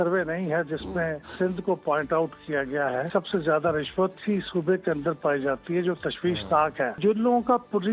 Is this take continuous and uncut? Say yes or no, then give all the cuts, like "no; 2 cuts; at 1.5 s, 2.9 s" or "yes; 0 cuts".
no; 4 cuts; at 1.2 s, 3.1 s, 4.2 s, 7.0 s